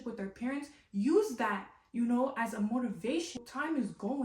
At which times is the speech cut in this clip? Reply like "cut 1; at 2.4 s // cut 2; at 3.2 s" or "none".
cut 1; at 3.3 s